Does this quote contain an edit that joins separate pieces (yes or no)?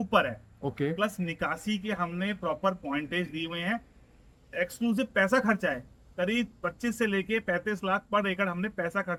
no